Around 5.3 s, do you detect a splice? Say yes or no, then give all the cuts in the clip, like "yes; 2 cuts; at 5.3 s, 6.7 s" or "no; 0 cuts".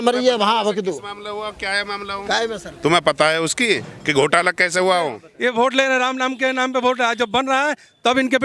yes; 1 cut; at 5.3 s